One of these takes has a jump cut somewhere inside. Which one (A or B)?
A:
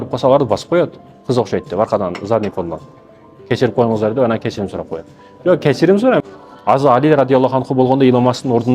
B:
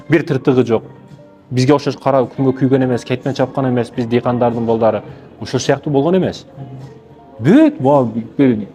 A